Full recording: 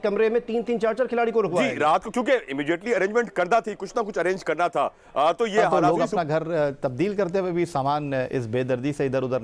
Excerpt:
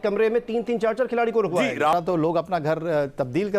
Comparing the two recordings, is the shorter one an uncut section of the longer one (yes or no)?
no